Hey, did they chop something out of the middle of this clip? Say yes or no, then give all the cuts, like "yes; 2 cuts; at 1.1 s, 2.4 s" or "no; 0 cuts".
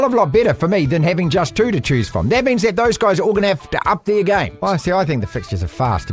yes; 1 cut; at 4.6 s